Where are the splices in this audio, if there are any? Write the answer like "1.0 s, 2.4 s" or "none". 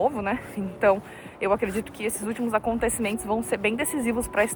none